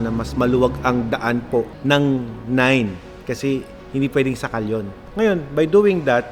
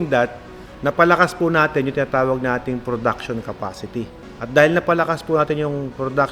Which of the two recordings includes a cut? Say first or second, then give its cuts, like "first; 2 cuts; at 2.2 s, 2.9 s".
first; 3 cuts; at 1.7 s, 3.8 s, 5.0 s